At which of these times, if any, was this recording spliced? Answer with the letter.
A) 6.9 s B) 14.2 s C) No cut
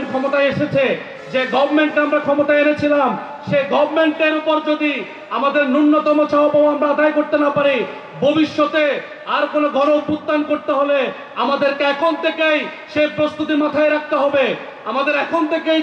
C